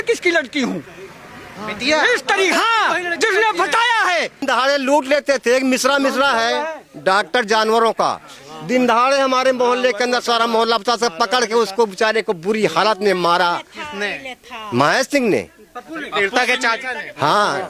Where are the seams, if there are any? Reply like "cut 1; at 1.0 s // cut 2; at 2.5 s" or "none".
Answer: cut 1; at 4.4 s